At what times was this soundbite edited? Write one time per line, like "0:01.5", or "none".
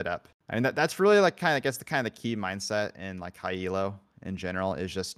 none